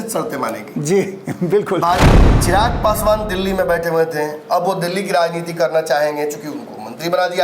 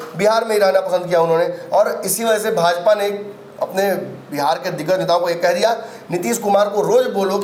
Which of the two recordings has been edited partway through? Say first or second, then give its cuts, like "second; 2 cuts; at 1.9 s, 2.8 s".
first; 1 cut; at 2.0 s